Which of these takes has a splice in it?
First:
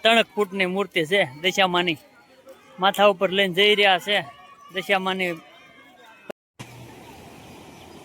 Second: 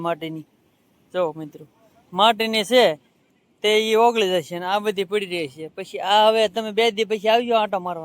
first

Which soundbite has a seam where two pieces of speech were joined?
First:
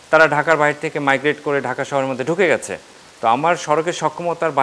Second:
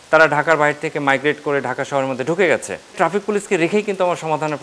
second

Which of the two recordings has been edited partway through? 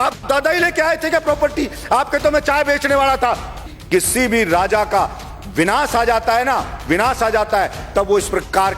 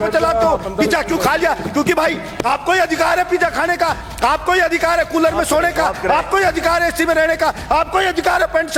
first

